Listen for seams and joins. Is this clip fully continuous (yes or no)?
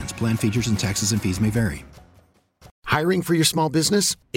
no